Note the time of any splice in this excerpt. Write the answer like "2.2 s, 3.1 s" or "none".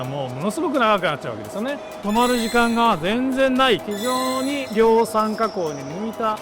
2.0 s, 3.8 s